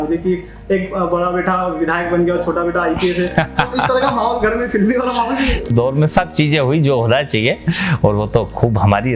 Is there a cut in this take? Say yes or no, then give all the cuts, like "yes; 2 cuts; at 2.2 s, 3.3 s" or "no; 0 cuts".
yes; 1 cut; at 5.7 s